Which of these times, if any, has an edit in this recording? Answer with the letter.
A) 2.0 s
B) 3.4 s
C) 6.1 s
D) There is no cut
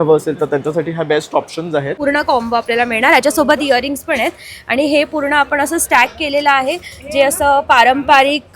A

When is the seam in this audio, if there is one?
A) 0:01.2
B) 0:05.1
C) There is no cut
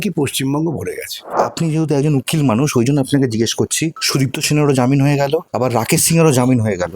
A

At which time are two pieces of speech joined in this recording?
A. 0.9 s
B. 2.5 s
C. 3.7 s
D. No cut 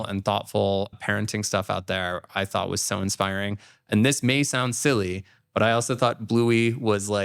A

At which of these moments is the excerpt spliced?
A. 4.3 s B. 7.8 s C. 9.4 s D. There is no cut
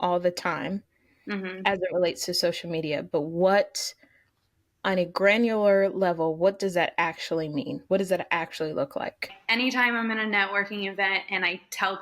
C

